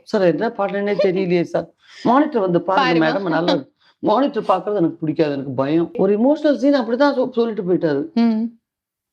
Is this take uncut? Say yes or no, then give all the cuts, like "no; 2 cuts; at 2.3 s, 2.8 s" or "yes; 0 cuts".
no; 1 cut; at 5.9 s